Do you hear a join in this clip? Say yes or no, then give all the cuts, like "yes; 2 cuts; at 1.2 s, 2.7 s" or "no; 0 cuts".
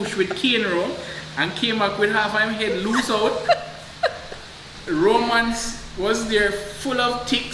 no; 0 cuts